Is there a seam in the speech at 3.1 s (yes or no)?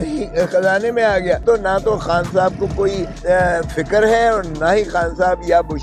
yes